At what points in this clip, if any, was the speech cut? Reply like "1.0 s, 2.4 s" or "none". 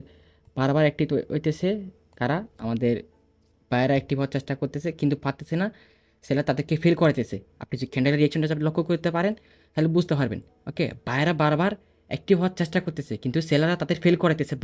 none